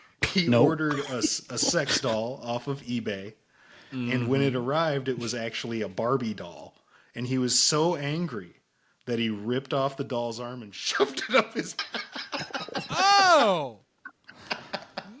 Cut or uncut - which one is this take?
cut